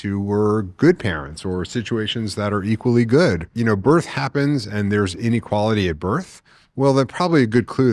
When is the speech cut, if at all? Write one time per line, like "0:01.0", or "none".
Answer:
0:03.5